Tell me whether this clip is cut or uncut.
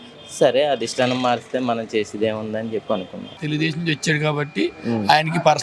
cut